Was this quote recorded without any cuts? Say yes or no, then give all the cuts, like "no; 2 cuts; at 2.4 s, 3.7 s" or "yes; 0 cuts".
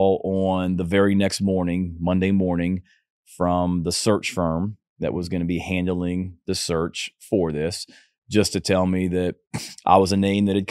yes; 0 cuts